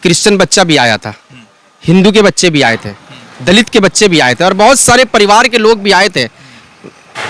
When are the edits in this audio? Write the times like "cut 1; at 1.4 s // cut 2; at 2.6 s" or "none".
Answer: none